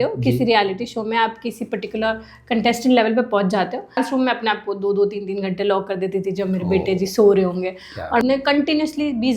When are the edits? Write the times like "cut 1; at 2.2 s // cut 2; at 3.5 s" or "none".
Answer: cut 1; at 4.0 s // cut 2; at 8.2 s